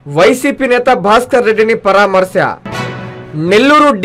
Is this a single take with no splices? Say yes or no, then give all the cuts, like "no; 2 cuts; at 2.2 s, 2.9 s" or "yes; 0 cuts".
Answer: yes; 0 cuts